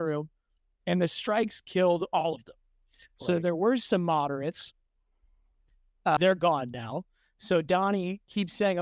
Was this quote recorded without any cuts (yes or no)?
no